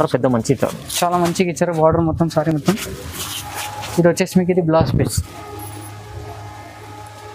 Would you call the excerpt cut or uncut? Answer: uncut